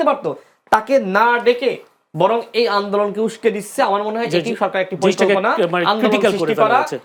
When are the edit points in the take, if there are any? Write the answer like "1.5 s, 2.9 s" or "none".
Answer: none